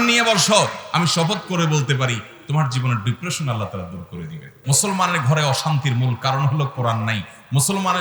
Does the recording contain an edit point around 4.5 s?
yes; 1 cut; at 4.5 s

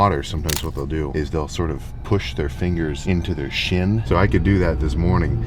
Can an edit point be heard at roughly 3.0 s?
yes; 3 cuts; at 1.1 s, 3.0 s, 4.0 s

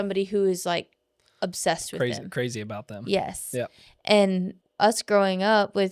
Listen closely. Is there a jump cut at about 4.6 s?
yes; 1 cut; at 4.6 s

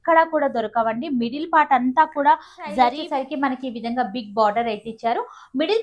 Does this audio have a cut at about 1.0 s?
no; 1 cut; at 3.0 s

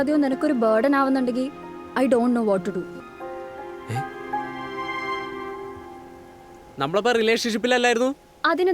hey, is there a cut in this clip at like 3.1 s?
yes; 1 cut; at 3.1 s

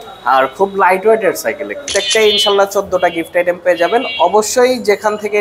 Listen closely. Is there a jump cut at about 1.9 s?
yes; 1 cut; at 1.9 s

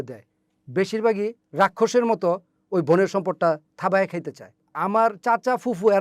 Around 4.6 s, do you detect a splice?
yes; 1 cut; at 4.6 s

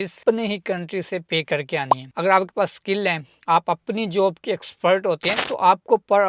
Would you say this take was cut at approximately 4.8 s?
no; 1 cut; at 2.1 s

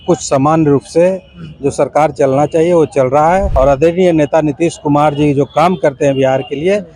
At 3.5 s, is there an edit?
yes; 1 cut; at 3.5 s

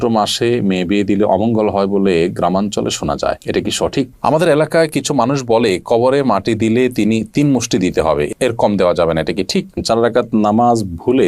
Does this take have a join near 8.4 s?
no; 2 cuts; at 4.1 s, 9.8 s

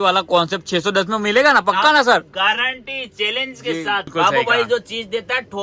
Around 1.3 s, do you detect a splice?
no; 1 cut; at 4.1 s

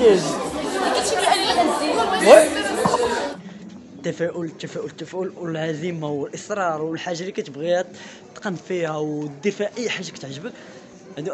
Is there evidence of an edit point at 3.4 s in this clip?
yes; 1 cut; at 3.4 s

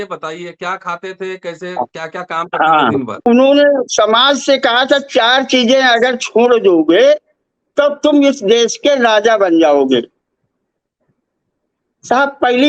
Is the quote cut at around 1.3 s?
no; 1 cut; at 3.3 s

